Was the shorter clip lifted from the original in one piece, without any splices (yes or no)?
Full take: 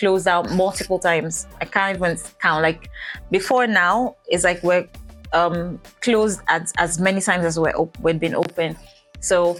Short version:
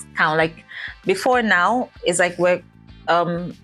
yes